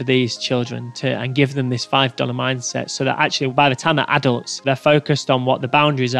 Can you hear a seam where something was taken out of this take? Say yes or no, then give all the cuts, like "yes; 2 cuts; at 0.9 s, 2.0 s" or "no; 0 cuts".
yes; 1 cut; at 4.5 s